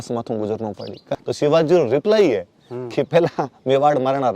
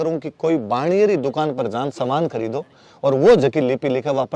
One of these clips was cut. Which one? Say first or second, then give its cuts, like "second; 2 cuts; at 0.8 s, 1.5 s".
first; 1 cut; at 1.0 s